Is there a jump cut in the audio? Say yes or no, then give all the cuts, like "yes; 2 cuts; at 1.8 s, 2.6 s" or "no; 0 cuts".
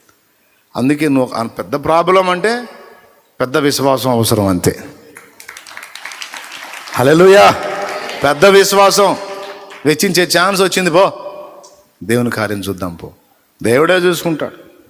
no; 0 cuts